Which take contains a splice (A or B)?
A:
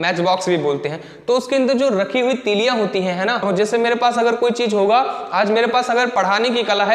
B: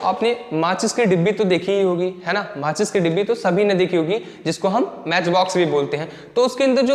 A